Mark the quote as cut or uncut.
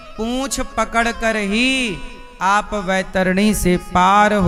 uncut